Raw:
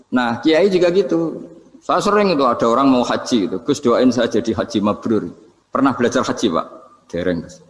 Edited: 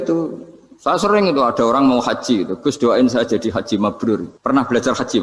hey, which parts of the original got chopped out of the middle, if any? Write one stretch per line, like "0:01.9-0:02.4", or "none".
0:05.4-0:05.6